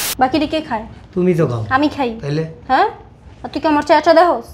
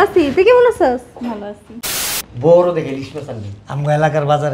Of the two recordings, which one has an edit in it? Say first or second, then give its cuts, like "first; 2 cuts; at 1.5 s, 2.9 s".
second; 1 cut; at 1.7 s